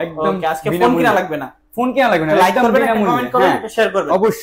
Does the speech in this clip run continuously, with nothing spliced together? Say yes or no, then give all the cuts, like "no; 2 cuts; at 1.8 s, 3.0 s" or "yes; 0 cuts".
yes; 0 cuts